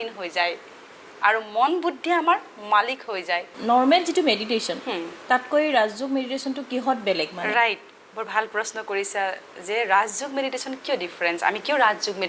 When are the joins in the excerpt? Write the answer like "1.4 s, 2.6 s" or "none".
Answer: 3.5 s